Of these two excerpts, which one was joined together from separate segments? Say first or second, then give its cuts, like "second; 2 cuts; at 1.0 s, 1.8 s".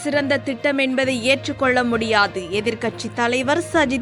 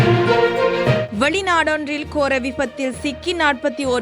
second; 1 cut; at 1.1 s